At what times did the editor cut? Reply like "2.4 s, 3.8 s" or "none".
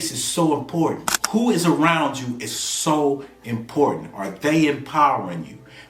1.1 s